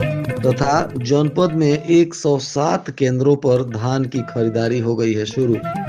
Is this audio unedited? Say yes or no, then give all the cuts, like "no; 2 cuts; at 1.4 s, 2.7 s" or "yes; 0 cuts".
yes; 0 cuts